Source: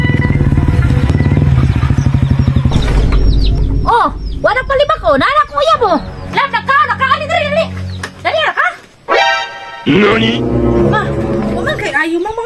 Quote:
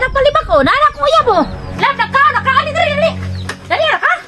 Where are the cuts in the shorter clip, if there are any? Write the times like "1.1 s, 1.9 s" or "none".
none